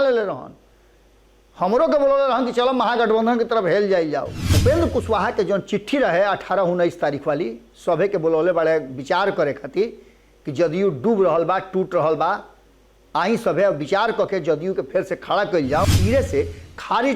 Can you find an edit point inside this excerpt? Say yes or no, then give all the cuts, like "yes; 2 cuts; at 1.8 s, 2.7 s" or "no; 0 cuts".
yes; 2 cuts; at 4.4 s, 15.9 s